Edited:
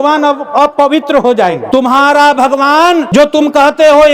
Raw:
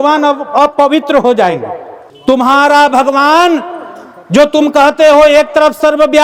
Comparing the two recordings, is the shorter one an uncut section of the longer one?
no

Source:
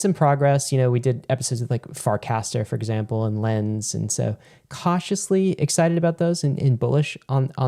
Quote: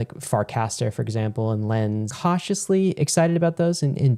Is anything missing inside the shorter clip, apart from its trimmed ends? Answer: yes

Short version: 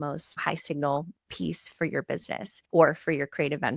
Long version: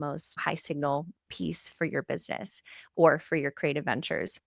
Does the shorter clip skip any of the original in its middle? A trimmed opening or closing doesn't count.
yes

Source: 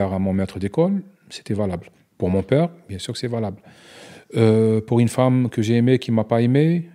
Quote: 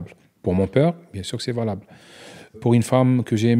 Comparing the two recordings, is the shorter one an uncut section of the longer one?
no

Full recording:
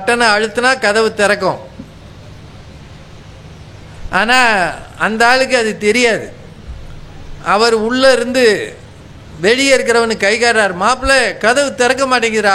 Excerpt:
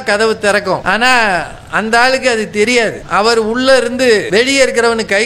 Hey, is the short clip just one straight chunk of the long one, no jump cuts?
no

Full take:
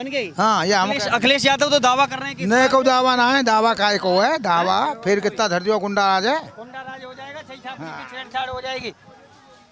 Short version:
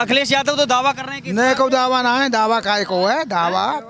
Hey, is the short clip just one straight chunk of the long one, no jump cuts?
yes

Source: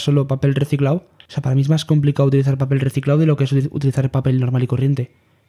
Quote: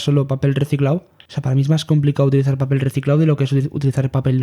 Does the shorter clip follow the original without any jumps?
yes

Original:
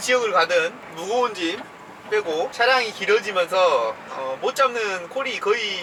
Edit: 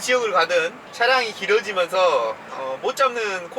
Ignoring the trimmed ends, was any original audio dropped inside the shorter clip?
yes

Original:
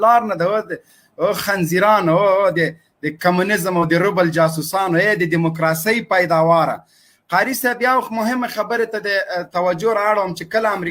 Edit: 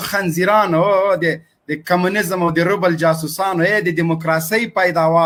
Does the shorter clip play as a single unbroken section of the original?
yes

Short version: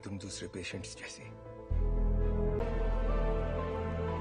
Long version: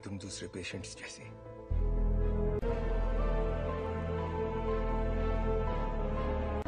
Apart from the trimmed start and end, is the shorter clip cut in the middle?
yes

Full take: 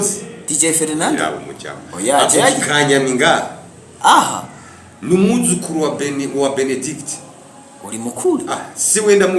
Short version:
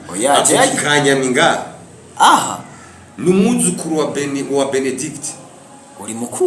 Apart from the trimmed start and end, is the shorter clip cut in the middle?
no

